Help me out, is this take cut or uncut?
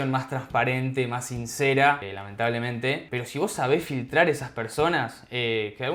uncut